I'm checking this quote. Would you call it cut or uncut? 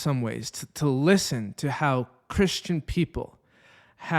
uncut